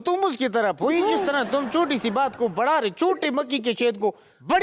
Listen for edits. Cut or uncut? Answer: uncut